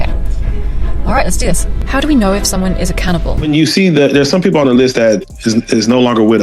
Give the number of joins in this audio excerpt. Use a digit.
1